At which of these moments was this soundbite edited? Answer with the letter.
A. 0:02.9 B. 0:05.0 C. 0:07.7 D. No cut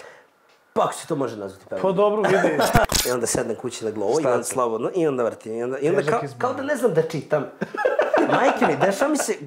A